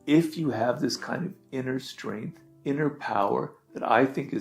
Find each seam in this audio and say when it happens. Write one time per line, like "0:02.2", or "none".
0:02.4